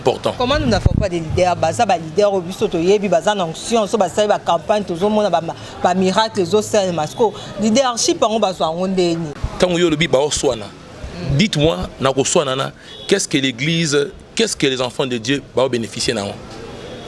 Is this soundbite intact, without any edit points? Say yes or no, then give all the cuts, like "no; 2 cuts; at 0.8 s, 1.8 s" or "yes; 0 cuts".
no; 1 cut; at 9.3 s